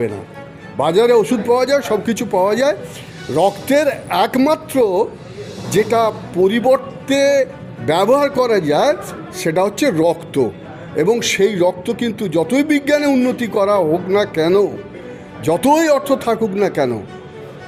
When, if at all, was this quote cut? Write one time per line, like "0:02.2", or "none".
none